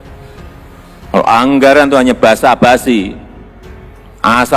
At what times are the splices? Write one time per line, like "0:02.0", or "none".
0:01.1